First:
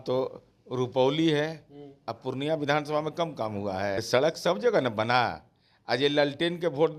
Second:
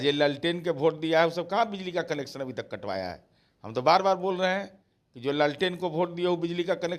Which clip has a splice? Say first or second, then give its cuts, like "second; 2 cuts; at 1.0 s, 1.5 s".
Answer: first; 1 cut; at 4.0 s